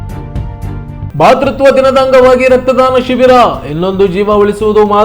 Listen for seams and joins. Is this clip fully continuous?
no; 1 cut; at 1.1 s

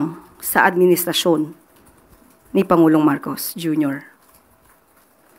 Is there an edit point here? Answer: no; 0 cuts

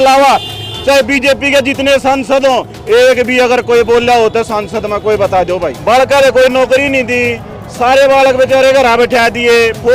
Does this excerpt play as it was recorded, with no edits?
no; 1 cut; at 5.7 s

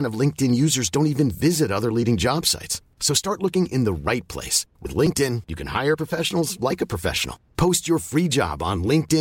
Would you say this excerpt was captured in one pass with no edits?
yes; 0 cuts

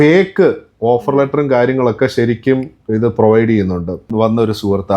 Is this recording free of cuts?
no; 1 cut; at 4.0 s

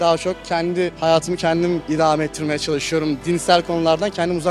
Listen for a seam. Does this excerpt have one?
no; 0 cuts

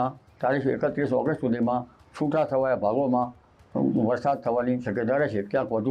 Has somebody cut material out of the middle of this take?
no; 0 cuts

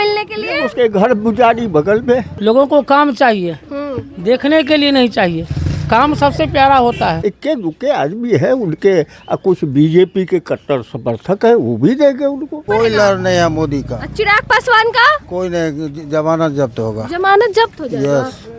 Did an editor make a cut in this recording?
yes; 3 cuts; at 2.3 s, 7.2 s, 12.6 s

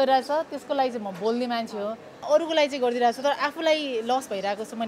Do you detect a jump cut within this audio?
yes; 1 cut; at 2.3 s

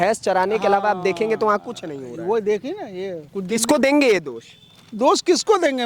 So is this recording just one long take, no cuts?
no; 1 cut; at 3.2 s

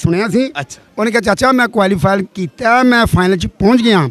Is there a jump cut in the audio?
no; 0 cuts

